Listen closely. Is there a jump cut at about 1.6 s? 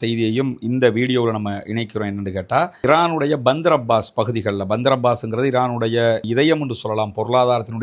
no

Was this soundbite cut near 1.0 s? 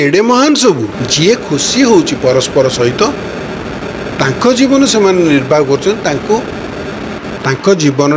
yes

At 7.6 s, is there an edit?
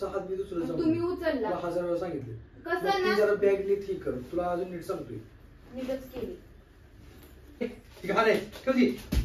yes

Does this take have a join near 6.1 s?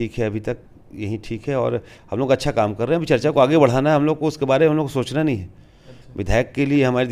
no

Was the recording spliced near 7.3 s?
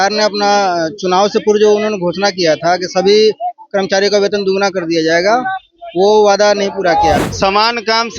yes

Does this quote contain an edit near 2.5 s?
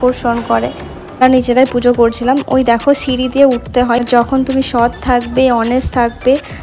no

